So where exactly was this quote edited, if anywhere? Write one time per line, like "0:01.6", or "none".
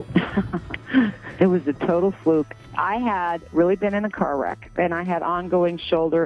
0:02.6